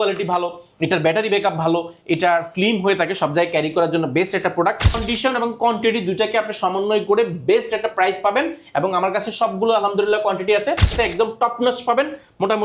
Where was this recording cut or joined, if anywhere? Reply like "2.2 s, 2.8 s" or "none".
5.0 s, 10.9 s